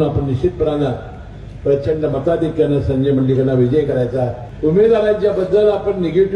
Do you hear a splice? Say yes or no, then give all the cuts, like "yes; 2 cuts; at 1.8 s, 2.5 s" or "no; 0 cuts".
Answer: yes; 1 cut; at 4.4 s